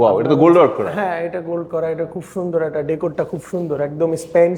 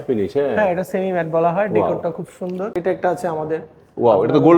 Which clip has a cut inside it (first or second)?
second